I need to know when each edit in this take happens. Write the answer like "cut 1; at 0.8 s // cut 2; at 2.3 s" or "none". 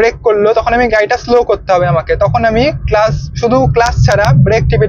none